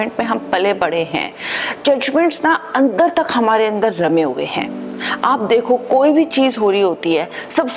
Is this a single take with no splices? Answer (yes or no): yes